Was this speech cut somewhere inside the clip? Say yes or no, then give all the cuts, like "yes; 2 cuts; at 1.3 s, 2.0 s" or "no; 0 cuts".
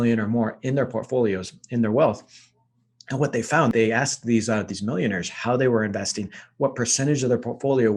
no; 0 cuts